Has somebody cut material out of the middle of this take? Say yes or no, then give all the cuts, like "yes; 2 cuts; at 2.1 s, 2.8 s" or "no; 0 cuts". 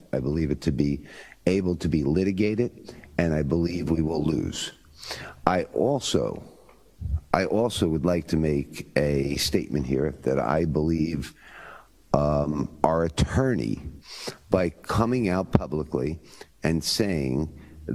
no; 0 cuts